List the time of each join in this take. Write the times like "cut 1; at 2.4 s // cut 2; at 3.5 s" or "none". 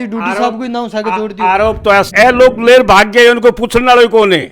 cut 1; at 2.1 s